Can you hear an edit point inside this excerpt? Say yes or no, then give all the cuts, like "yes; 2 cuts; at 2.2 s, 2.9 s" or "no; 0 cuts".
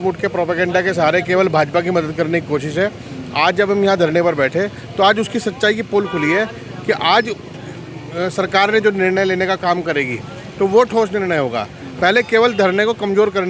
no; 0 cuts